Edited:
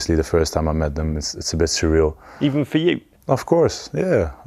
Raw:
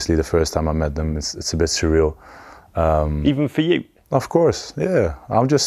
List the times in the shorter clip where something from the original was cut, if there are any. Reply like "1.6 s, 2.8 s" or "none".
2.3 s